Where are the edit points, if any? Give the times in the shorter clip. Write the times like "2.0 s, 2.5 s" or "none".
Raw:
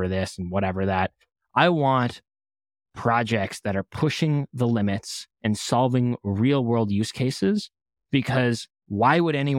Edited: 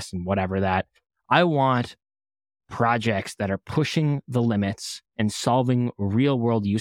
none